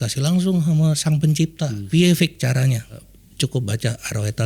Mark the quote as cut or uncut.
cut